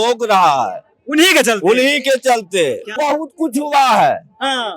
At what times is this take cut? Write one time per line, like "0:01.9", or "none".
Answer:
0:02.9

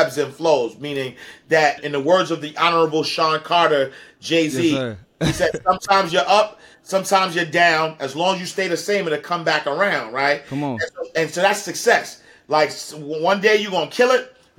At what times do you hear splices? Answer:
0:01.8

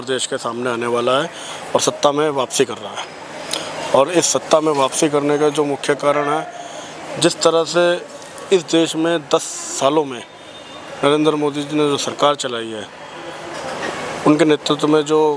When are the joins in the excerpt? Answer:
none

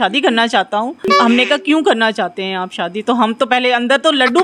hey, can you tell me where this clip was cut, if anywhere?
0:01.1

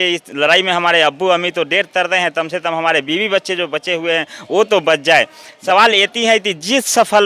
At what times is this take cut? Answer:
0:05.5

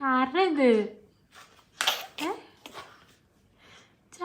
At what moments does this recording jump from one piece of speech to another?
none

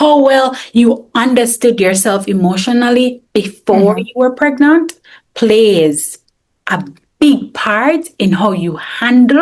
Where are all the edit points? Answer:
none

